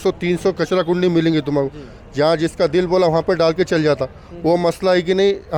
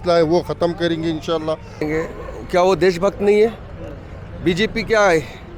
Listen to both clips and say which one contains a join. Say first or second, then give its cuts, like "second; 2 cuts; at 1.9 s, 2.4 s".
second; 1 cut; at 1.9 s